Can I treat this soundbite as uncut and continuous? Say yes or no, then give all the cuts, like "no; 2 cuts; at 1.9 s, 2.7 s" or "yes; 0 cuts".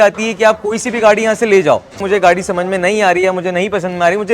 no; 1 cut; at 2.0 s